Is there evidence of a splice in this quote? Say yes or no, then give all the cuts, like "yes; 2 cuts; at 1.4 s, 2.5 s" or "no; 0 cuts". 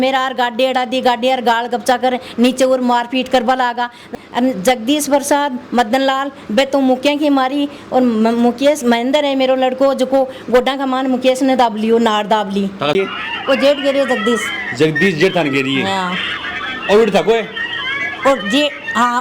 yes; 2 cuts; at 4.0 s, 12.9 s